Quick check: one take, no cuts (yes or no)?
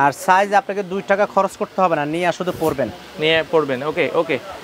yes